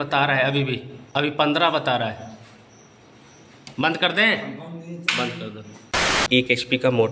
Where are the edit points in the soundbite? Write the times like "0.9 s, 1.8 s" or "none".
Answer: 0.9 s, 6.1 s